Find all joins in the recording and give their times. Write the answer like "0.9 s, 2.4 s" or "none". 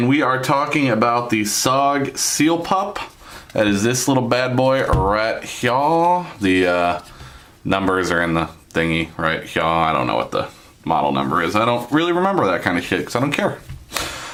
none